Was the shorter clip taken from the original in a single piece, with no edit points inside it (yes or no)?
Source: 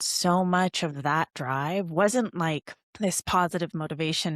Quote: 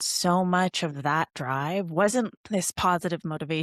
no